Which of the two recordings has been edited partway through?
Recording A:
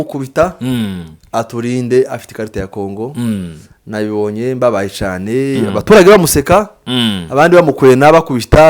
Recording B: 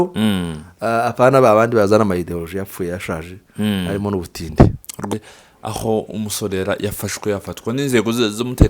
B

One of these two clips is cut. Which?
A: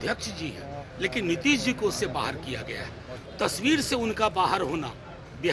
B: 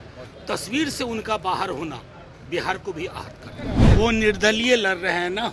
B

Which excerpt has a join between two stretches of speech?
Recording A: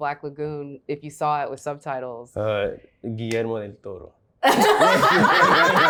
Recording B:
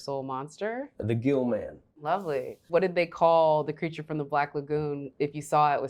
B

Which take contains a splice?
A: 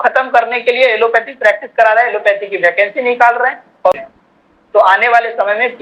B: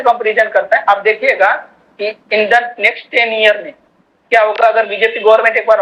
A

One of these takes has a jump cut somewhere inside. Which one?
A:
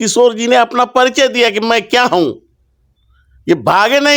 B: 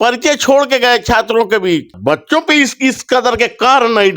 B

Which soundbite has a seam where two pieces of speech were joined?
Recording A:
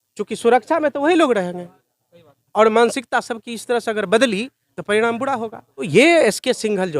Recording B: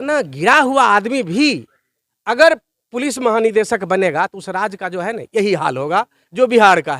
A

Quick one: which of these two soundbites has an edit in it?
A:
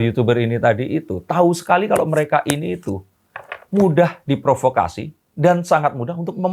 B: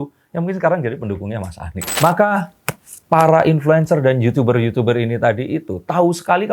B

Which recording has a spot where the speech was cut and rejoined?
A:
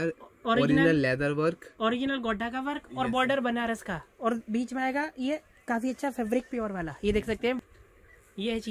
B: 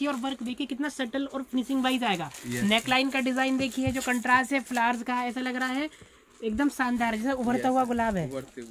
A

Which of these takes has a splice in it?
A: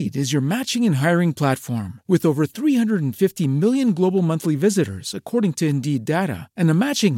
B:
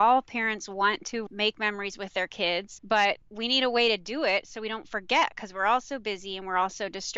B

